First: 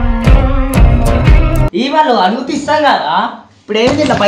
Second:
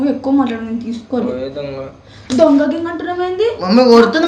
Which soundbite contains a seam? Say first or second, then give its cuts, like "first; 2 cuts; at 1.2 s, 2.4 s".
first; 1 cut; at 1.7 s